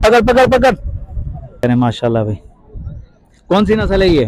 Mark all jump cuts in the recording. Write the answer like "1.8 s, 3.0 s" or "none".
1.6 s